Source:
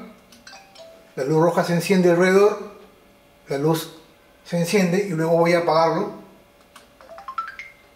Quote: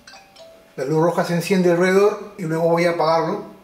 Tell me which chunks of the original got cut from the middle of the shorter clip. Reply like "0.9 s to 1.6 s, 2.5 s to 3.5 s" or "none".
2.8 s to 5.1 s